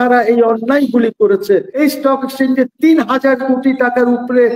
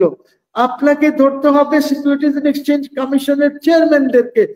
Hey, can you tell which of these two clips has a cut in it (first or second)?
first